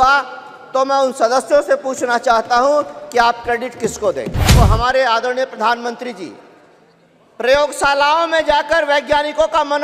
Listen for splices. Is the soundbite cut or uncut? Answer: cut